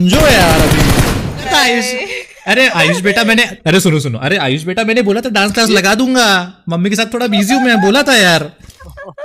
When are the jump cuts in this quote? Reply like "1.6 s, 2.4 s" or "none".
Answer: 1.5 s

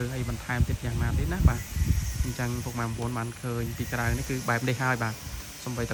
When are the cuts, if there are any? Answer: none

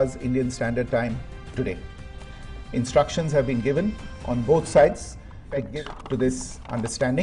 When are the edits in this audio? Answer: 5.7 s

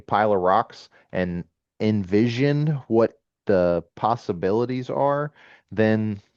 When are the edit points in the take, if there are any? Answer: none

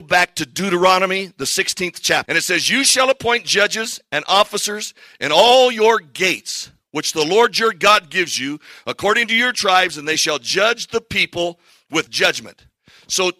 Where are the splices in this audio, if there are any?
2.3 s, 12.1 s

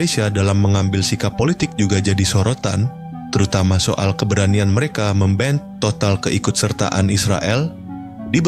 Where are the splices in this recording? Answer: none

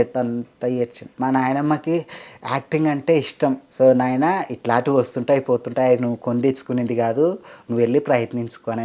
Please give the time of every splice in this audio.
1.0 s, 3.6 s

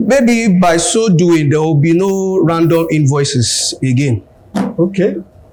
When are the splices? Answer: none

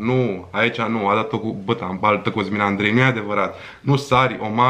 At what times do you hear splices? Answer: none

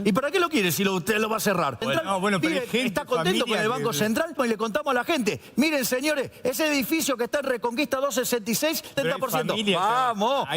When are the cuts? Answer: 1.8 s, 4.3 s, 8.9 s

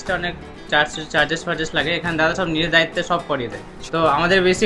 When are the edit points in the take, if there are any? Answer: 3.7 s

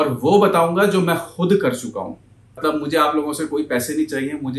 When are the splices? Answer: 2.6 s

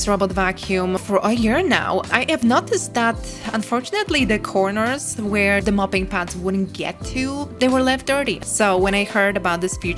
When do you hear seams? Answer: 7.5 s, 8.4 s

